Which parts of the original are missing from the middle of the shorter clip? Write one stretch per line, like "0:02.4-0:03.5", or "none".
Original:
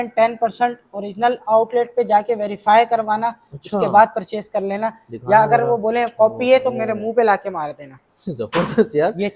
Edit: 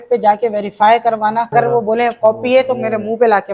0:03.4-0:05.5